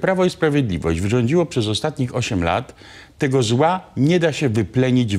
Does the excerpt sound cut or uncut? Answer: uncut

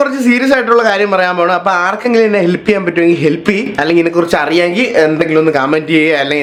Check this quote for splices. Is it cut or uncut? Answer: uncut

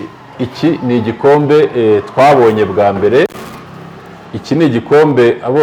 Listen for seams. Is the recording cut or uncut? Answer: uncut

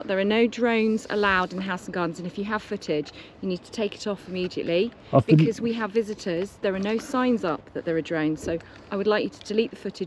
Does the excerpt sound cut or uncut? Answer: uncut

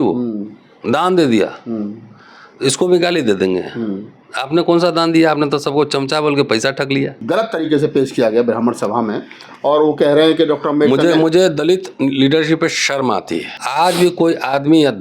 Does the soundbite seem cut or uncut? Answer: cut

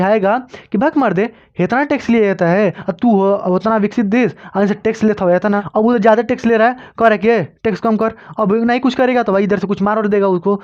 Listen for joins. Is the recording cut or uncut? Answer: cut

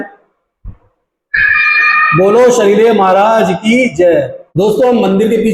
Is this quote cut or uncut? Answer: cut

